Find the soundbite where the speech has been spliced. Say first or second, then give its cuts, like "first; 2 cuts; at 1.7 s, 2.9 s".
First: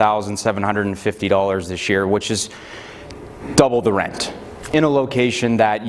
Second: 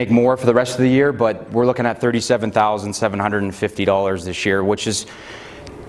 first; 1 cut; at 4.7 s